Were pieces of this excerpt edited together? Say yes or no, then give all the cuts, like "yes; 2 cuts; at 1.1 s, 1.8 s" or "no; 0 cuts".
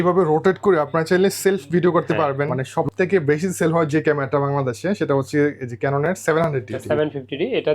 yes; 2 cuts; at 2.6 s, 6.8 s